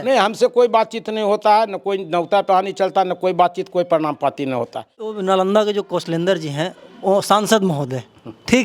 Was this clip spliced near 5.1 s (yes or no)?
yes